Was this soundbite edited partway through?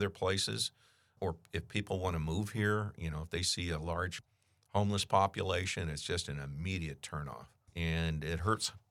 yes; 1 cut; at 7.7 s

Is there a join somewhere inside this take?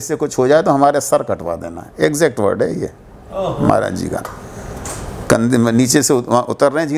no; 0 cuts

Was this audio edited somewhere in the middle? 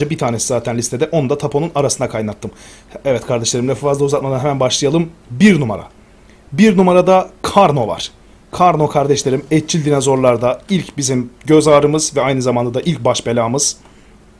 no; 0 cuts

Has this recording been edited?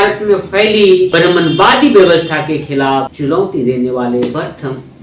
yes; 3 cuts; at 1.1 s, 3.1 s, 4.3 s

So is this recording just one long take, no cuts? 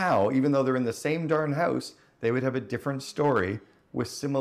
yes; 0 cuts

